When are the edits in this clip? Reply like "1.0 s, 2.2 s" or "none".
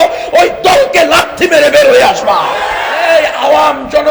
3.0 s